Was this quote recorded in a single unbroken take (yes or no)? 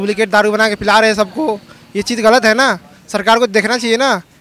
yes